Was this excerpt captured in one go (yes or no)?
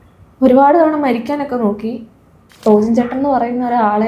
no